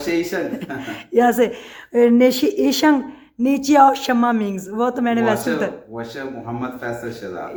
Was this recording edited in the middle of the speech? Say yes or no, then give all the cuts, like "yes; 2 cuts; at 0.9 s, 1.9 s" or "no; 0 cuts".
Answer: no; 0 cuts